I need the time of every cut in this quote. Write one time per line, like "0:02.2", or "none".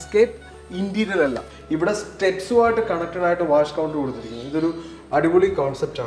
0:01.5